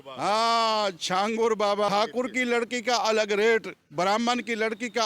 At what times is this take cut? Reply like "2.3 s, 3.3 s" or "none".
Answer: 1.9 s